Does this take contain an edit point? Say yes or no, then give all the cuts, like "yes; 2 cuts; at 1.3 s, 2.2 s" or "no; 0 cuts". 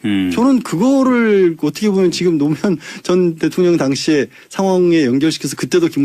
yes; 1 cut; at 1.5 s